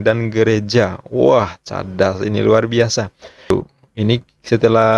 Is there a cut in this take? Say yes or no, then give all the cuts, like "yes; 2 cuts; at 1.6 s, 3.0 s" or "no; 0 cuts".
yes; 1 cut; at 3.5 s